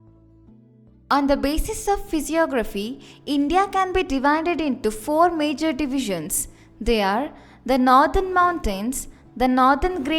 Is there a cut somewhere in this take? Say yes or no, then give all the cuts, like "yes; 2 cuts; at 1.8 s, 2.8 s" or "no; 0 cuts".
yes; 1 cut; at 1.0 s